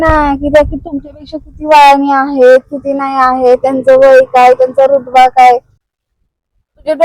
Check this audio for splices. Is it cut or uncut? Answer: cut